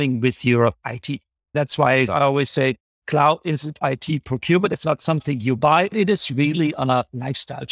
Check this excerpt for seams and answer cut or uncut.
cut